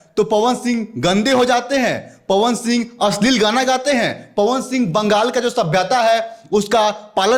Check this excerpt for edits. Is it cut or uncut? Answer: uncut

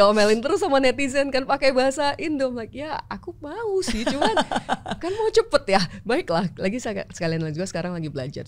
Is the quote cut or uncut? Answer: uncut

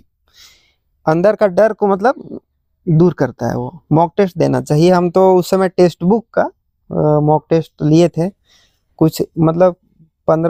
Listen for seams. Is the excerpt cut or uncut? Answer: uncut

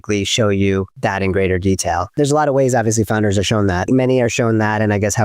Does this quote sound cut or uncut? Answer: cut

